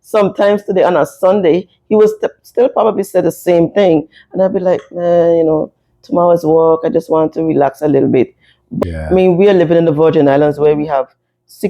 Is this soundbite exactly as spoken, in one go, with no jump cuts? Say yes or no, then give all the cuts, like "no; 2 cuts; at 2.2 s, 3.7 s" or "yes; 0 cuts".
no; 1 cut; at 8.8 s